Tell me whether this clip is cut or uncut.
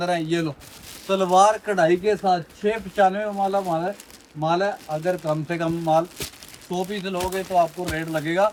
uncut